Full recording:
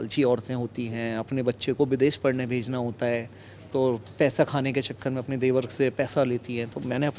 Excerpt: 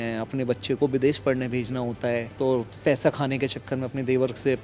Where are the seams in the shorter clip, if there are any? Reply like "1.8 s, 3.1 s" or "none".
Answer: 2.3 s